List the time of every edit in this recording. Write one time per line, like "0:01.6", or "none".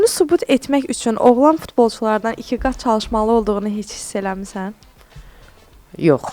none